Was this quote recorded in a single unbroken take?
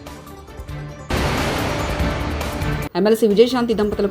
yes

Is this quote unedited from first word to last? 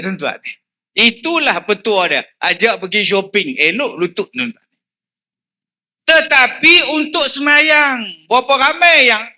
yes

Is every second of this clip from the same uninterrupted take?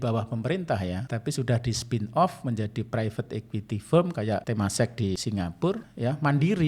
no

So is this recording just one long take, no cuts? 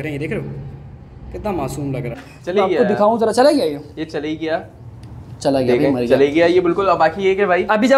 no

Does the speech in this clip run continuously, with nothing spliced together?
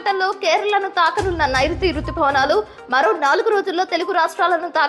yes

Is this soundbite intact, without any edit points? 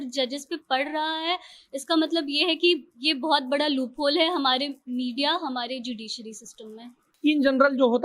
no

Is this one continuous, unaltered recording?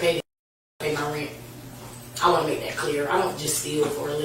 yes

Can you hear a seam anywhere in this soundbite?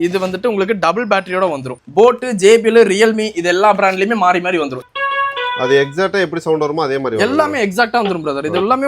yes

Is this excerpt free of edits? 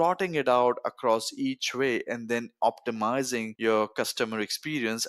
no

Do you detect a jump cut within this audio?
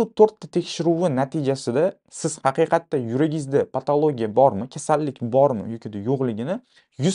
no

